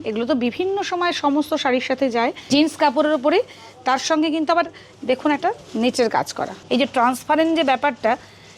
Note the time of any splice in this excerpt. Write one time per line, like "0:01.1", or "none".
0:02.4
0:06.5